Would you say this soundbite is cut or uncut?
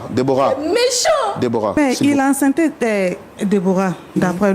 cut